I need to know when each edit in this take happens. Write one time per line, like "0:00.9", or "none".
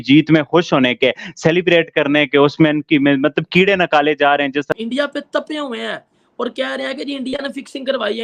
0:04.7